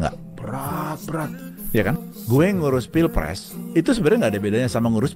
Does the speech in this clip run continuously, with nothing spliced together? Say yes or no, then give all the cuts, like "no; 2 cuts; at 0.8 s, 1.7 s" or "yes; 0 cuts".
yes; 0 cuts